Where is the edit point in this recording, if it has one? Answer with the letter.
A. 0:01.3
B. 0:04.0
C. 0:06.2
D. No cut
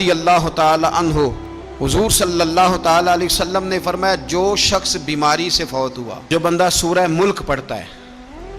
C